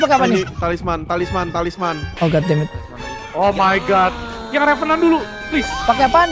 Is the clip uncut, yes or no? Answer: no